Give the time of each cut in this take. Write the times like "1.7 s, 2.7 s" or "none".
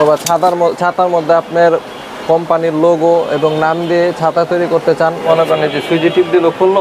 5.2 s